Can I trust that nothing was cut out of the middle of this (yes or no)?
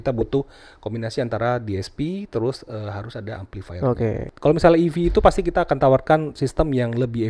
no